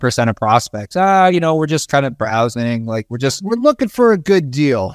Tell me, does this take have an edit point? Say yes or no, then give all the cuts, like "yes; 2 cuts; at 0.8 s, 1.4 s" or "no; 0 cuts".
no; 0 cuts